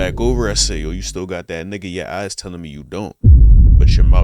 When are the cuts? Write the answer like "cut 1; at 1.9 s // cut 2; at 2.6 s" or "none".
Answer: none